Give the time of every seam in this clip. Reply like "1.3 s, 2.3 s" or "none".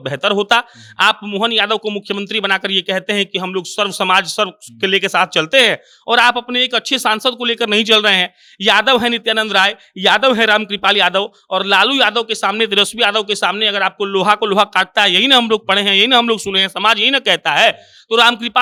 none